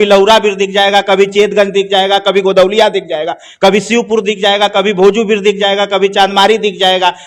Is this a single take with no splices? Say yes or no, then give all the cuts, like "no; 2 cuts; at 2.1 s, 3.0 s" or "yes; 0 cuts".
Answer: yes; 0 cuts